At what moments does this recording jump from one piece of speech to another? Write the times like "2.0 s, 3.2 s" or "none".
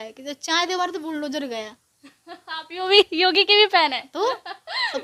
none